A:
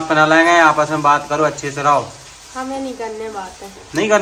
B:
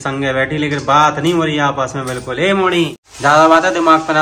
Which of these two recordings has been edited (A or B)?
B